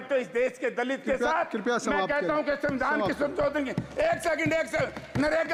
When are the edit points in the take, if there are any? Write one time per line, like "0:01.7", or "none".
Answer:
none